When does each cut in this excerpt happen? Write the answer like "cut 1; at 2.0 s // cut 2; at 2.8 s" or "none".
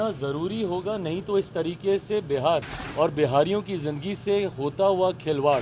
cut 1; at 2.8 s